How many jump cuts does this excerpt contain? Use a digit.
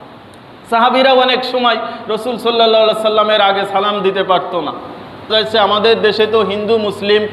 1